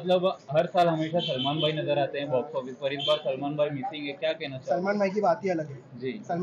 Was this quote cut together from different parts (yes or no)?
no